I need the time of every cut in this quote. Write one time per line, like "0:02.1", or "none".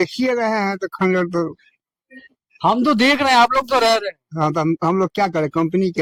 none

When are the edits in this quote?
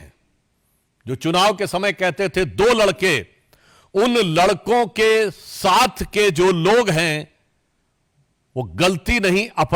none

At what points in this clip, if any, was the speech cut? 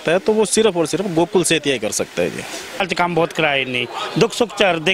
0:02.9

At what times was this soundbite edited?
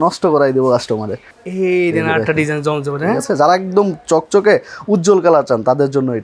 0:01.3

